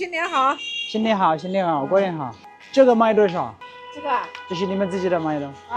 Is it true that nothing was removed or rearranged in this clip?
yes; 0 cuts

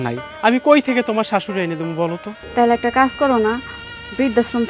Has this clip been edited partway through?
yes; 1 cut; at 2.3 s

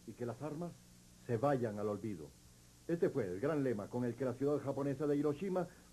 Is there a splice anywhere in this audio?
no; 0 cuts

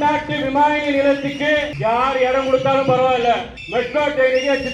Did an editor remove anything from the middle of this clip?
yes; 2 cuts; at 1.7 s, 3.6 s

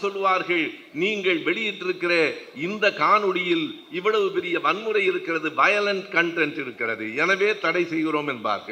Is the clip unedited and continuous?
yes; 0 cuts

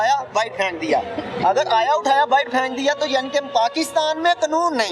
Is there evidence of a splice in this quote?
no; 0 cuts

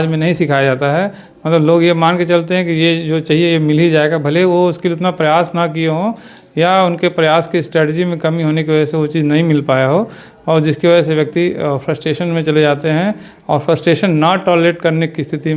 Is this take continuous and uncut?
yes; 0 cuts

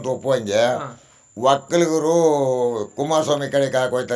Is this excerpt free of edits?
yes; 0 cuts

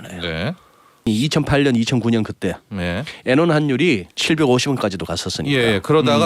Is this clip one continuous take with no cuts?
no; 2 cuts; at 1.1 s, 4.1 s

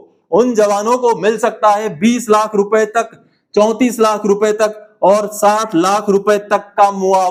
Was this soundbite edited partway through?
no; 0 cuts

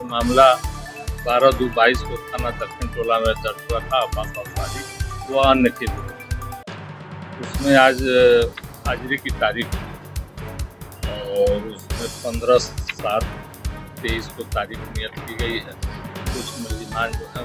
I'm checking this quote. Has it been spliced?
no; 0 cuts

